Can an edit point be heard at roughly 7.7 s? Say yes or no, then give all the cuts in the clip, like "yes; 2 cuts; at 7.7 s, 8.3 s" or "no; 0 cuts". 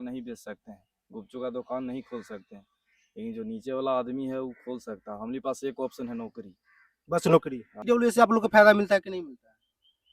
yes; 1 cut; at 7.7 s